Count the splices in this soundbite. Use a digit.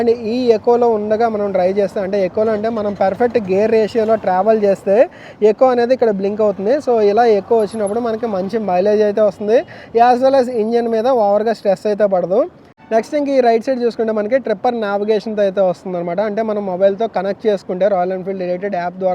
0